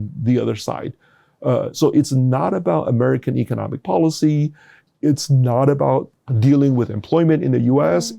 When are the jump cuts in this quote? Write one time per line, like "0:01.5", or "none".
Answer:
0:06.2